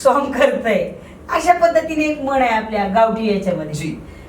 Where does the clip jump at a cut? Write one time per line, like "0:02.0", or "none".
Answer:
none